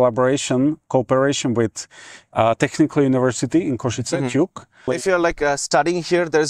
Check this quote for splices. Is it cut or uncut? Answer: cut